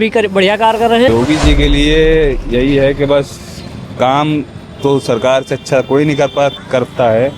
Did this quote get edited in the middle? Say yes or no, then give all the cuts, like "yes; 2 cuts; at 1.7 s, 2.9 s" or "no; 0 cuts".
yes; 1 cut; at 1.1 s